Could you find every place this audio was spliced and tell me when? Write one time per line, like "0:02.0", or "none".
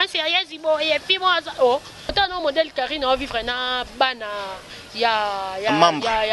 0:02.1

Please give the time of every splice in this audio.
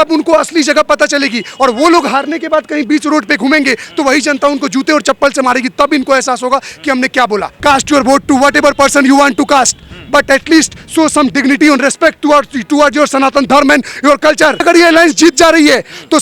0:07.5
0:14.6

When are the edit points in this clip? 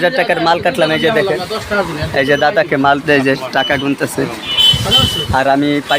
none

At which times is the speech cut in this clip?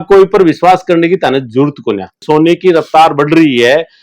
0:02.2

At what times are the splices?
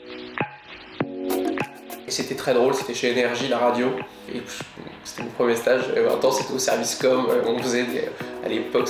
0:02.1

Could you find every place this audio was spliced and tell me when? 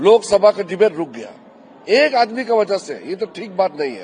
none

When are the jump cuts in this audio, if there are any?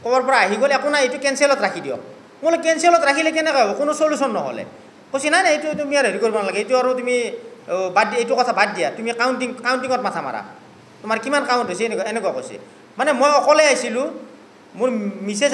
none

